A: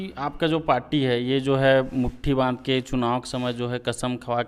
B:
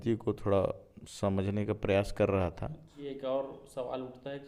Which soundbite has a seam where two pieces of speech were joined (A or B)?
B